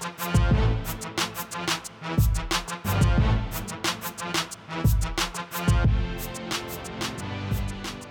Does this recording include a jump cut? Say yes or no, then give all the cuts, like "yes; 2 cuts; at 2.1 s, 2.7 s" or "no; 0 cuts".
no; 0 cuts